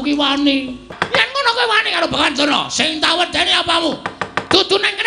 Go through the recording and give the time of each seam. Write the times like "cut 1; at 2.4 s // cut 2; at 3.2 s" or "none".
cut 1; at 0.9 s